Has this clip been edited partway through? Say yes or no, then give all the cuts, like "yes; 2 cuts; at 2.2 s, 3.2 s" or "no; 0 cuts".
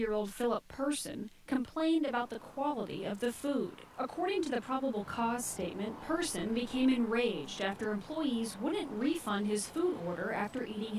no; 0 cuts